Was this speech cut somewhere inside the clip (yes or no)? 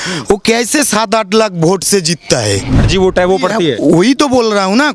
yes